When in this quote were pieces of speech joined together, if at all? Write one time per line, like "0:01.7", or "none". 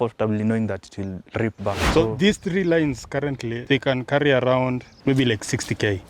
0:01.8
0:03.5
0:04.9